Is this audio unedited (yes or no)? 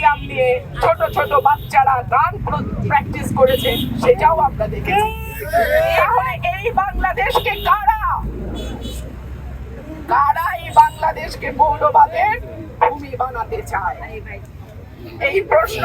yes